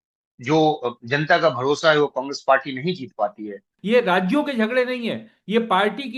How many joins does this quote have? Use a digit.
1